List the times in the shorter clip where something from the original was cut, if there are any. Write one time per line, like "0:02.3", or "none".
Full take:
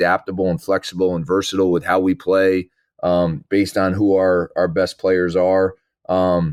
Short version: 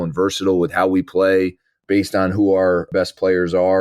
0:01.8
0:02.9

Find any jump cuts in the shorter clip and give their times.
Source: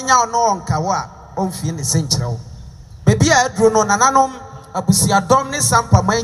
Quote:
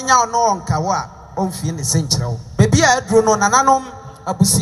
0:02.4

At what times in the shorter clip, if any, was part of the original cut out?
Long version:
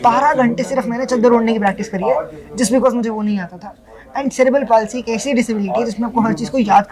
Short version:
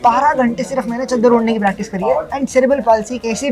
0:02.3

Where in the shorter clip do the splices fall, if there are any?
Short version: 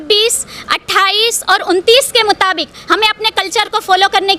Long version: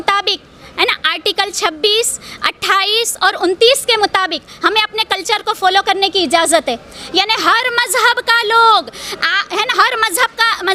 none

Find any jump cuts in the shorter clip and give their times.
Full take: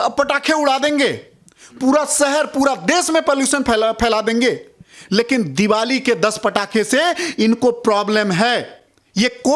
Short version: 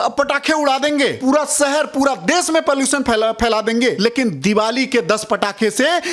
0:01.2
0:04.0

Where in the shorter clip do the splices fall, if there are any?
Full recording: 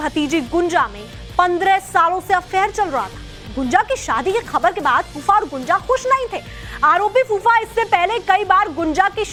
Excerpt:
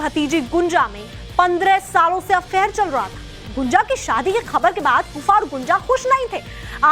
none

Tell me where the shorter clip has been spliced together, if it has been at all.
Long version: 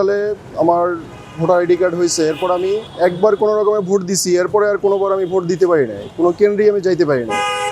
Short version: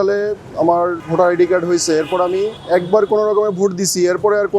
0:01.0

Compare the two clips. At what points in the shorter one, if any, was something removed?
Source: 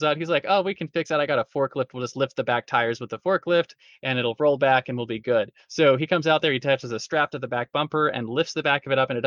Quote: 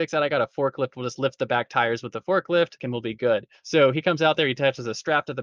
0:02.9

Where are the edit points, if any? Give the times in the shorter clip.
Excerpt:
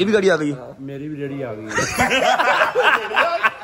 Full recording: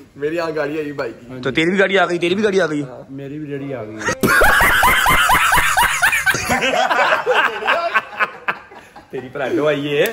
0:01.8

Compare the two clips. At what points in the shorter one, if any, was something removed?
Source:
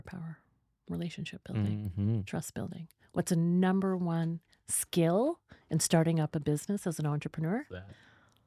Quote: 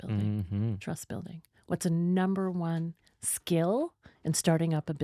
none

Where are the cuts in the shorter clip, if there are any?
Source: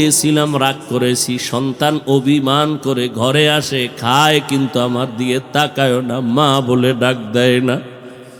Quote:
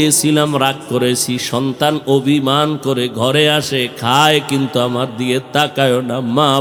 none

